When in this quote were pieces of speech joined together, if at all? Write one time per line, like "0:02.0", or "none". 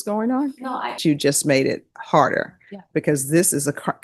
0:01.0